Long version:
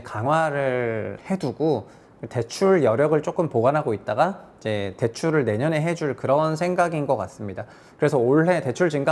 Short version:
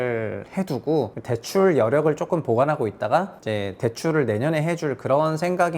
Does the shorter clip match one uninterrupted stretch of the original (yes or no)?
no